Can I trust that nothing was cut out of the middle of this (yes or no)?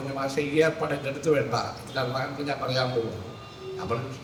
yes